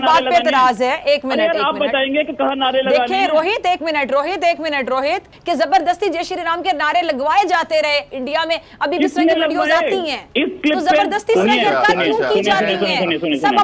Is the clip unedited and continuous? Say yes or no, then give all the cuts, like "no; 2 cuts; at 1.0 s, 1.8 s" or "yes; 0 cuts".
yes; 0 cuts